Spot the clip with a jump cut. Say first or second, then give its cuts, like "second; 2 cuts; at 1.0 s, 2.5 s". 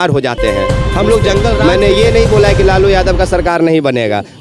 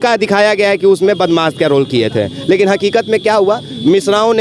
first; 1 cut; at 1.6 s